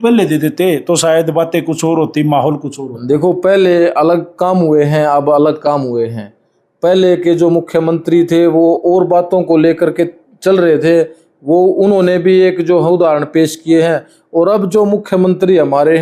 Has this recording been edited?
no; 0 cuts

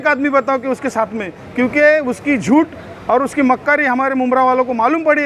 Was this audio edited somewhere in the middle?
no; 0 cuts

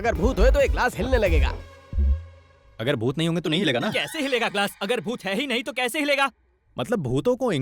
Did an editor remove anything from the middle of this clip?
no; 0 cuts

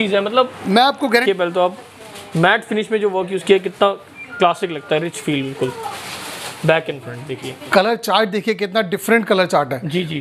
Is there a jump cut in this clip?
yes; 2 cuts; at 1.2 s, 7.6 s

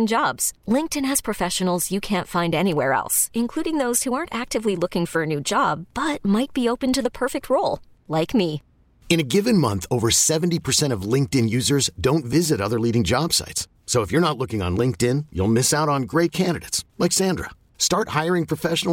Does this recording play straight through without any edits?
yes; 0 cuts

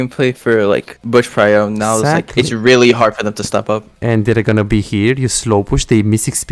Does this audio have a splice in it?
yes; 1 cut; at 0.9 s

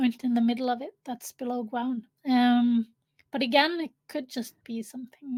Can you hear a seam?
no; 0 cuts

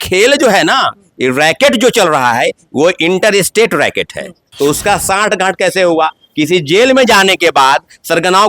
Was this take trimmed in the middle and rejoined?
yes; 1 cut; at 4.4 s

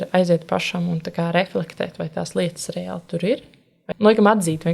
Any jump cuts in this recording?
yes; 1 cut; at 3.8 s

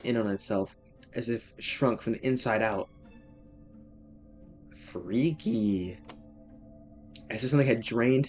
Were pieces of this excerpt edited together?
no; 0 cuts

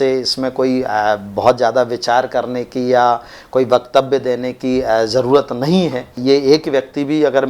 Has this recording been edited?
yes; 1 cut; at 6.2 s

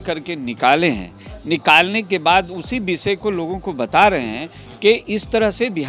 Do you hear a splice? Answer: no; 0 cuts

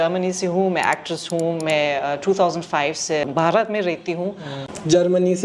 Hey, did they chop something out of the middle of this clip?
yes; 2 cuts; at 3.2 s, 4.4 s

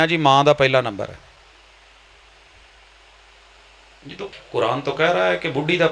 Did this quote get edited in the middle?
yes; 1 cut; at 4.2 s

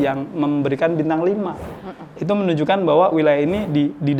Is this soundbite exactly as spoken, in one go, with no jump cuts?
yes; 0 cuts

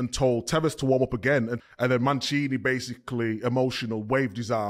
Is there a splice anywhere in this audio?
yes; 1 cut; at 1.6 s

